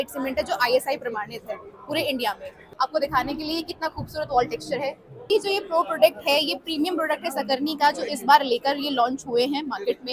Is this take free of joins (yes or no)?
no